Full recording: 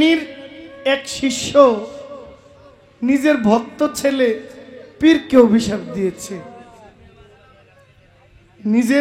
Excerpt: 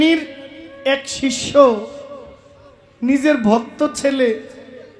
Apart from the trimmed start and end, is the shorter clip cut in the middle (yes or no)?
no